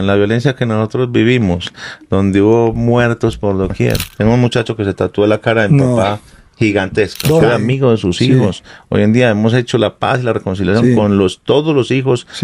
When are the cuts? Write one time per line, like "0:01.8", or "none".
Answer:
0:04.1
0:07.4

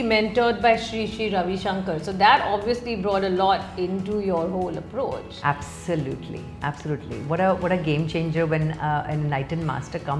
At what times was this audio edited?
none

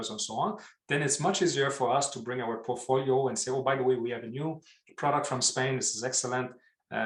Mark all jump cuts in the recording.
none

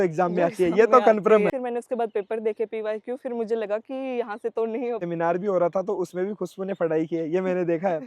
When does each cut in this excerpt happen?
0:01.5
0:05.0

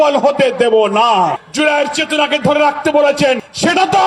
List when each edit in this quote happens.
0:01.4

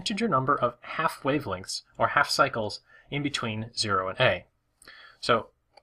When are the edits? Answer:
0:02.4

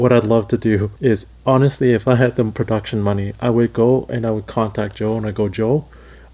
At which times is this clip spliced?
0:00.9
0:02.6

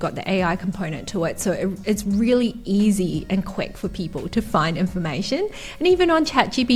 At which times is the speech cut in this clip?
none

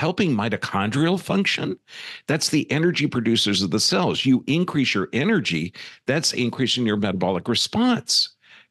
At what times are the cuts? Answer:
none

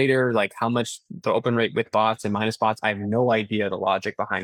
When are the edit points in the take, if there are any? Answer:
none

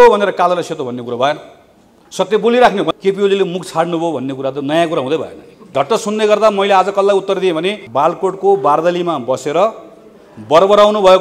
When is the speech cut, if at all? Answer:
0:02.9
0:05.7
0:07.8

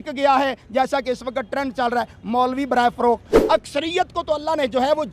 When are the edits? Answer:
0:03.3

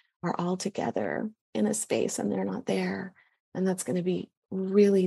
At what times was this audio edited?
none

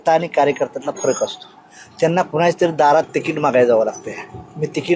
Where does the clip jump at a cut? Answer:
none

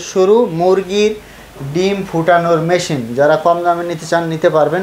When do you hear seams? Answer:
none

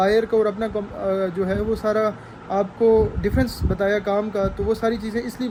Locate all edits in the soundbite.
none

